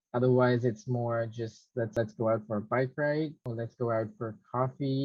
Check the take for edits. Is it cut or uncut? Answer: uncut